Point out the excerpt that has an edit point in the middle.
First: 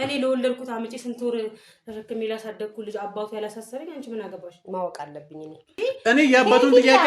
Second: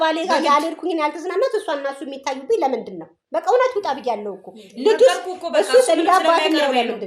first; 1 cut; at 5.7 s

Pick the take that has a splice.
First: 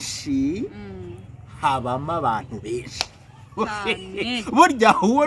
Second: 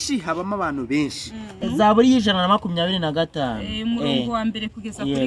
second; 1 cut; at 1.6 s

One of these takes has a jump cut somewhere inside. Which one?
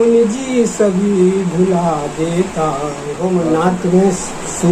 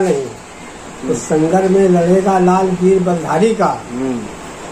first; 1 cut; at 3.2 s

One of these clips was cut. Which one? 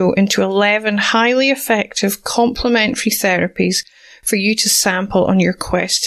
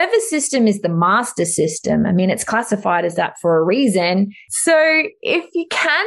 second; 1 cut; at 4.4 s

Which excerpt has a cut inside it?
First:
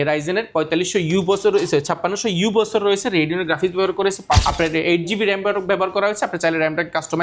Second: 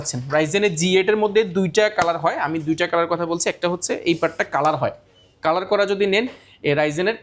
first; 1 cut; at 4.4 s

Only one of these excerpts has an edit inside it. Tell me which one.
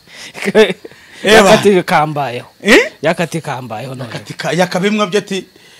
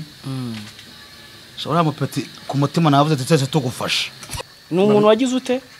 second; 1 cut; at 4.4 s

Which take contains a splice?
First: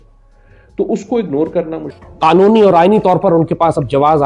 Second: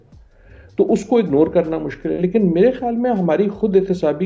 first; 1 cut; at 2.0 s

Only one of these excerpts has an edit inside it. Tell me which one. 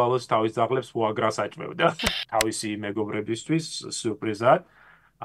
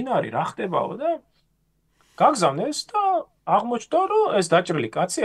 first; 1 cut; at 2.1 s

